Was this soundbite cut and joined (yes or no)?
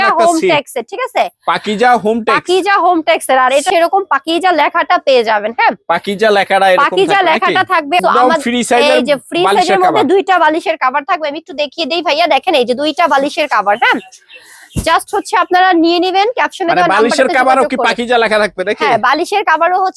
yes